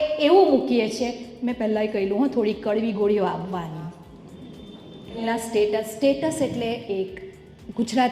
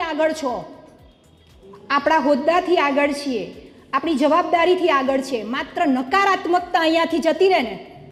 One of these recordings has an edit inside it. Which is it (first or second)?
first